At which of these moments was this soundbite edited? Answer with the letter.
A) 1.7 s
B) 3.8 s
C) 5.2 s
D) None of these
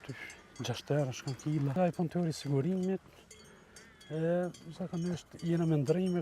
A